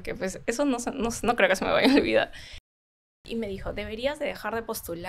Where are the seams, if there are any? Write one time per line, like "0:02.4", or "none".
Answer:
0:02.8